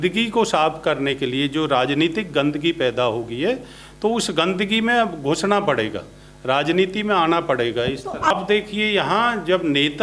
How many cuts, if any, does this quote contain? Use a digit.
1